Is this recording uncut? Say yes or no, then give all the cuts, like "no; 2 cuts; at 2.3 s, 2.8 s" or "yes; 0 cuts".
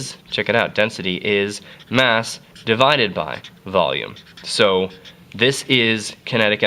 no; 1 cut; at 3.9 s